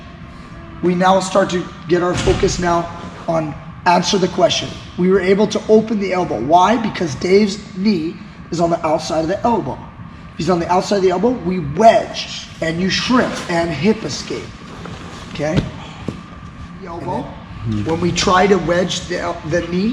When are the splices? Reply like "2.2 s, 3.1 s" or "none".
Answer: 17.1 s